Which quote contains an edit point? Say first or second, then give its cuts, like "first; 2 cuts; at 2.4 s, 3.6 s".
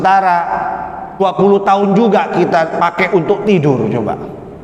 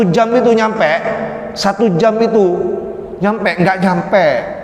first; 1 cut; at 1.2 s